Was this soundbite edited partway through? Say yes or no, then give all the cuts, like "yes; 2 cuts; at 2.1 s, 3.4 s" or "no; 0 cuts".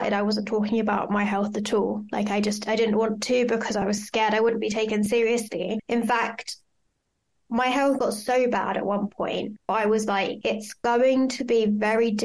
no; 0 cuts